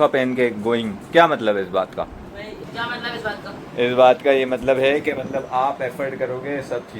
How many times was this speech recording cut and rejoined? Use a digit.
1